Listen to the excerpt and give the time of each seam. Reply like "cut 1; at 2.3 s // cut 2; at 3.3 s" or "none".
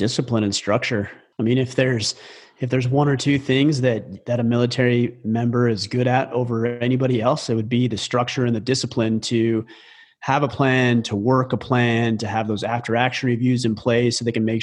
cut 1; at 1.2 s